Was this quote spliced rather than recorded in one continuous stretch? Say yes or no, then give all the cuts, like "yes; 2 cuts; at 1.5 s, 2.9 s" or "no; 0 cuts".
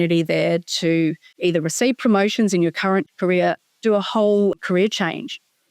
yes; 3 cuts; at 1.3 s, 3.1 s, 4.6 s